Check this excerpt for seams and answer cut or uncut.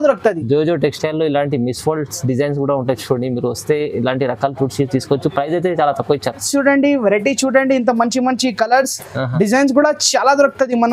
cut